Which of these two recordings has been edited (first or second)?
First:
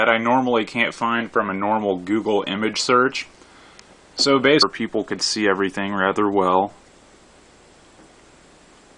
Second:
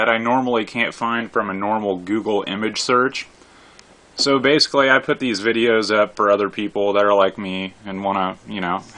second